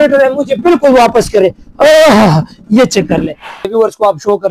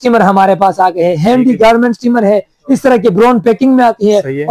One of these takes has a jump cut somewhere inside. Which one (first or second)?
first